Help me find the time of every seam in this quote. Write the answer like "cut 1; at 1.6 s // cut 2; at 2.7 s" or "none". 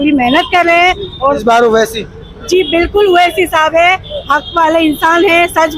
cut 1; at 1.4 s

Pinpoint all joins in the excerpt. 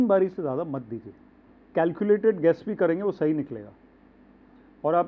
cut 1; at 1.6 s

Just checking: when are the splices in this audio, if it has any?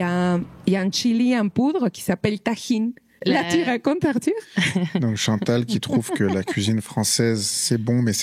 cut 1; at 3.2 s

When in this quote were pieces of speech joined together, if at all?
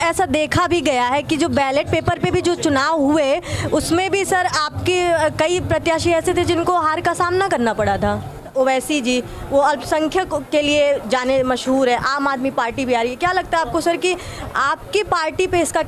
cut 1; at 8.5 s

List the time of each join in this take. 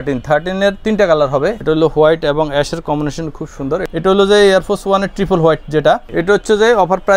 cut 1; at 1.6 s // cut 2; at 3.8 s // cut 3; at 6.1 s

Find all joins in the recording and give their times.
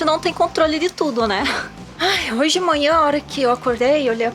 cut 1; at 1.9 s

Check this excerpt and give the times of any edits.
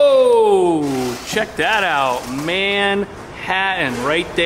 none

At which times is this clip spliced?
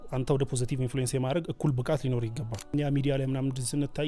cut 1; at 2.7 s

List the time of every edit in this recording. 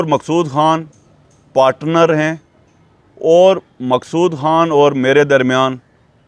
none

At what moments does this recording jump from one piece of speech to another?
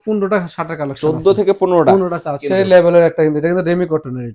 cut 1; at 2.4 s

